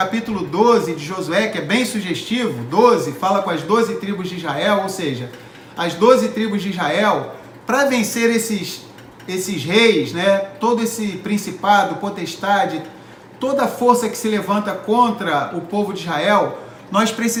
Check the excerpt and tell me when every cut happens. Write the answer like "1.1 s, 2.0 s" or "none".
none